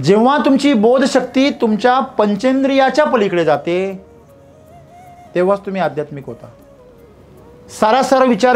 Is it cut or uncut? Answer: cut